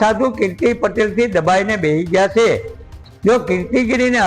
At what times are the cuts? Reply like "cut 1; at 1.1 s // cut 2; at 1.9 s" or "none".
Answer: cut 1; at 3.0 s